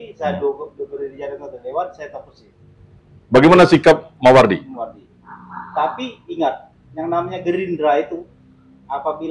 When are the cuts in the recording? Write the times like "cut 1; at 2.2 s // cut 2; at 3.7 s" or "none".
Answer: none